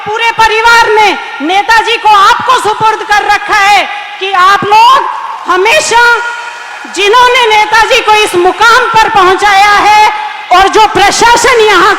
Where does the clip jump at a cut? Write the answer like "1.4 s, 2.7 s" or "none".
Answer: none